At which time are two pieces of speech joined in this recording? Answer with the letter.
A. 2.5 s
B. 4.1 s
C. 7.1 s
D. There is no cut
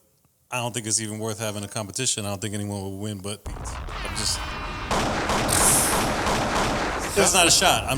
C